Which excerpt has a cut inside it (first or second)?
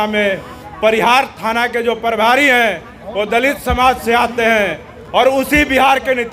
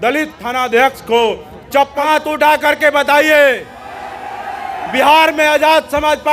second